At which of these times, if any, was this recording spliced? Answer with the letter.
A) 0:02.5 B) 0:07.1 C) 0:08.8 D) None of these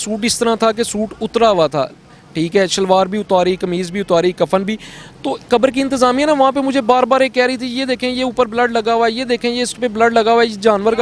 D